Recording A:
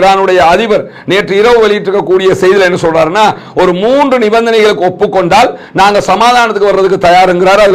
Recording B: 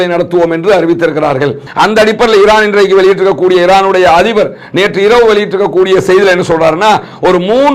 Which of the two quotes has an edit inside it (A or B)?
B